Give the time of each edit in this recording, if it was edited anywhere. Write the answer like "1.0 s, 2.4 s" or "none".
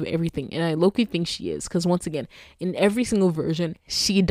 none

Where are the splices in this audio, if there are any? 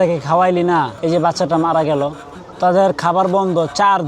0.9 s

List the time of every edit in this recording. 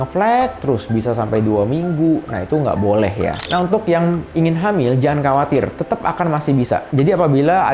3.4 s

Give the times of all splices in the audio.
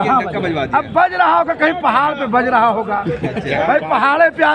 none

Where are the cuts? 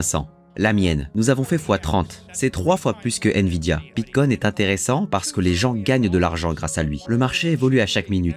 1.1 s, 2.2 s, 3.9 s, 7.0 s

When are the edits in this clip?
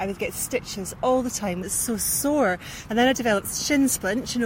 1.6 s, 2.7 s

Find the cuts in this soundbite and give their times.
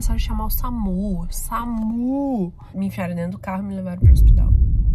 none

